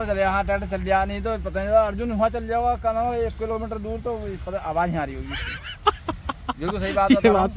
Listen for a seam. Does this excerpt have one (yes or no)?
no